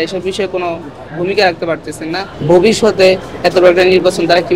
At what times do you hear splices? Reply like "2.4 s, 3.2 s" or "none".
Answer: 2.3 s